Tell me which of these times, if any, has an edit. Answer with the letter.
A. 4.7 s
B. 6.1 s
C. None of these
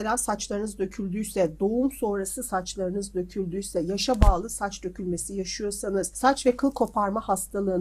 B